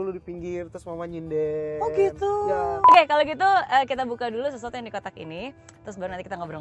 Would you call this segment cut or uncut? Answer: cut